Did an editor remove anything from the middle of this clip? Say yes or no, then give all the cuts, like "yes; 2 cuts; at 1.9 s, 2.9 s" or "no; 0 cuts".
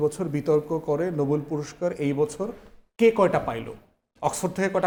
no; 0 cuts